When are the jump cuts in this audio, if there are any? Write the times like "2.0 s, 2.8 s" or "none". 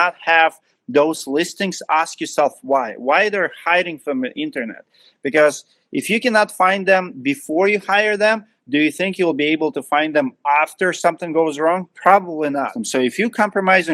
12.8 s